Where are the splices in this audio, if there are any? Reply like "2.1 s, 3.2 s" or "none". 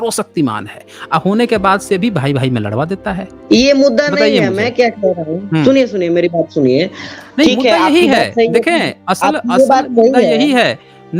3.3 s